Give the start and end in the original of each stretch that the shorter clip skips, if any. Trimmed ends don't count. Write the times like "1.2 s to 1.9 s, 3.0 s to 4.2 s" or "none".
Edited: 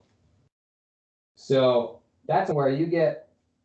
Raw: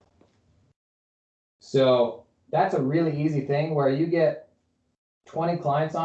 2.7 s to 3.7 s